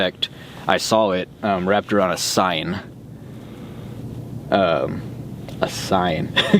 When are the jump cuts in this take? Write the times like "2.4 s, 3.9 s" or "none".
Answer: none